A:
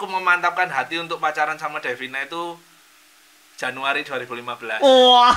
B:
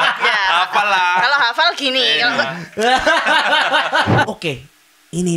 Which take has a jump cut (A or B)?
B